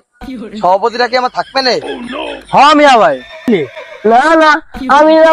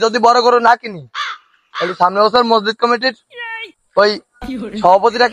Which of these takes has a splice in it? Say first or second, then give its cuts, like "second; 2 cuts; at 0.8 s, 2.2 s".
first; 1 cut; at 3.5 s